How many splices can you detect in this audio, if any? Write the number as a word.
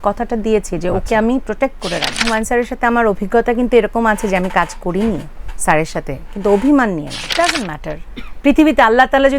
two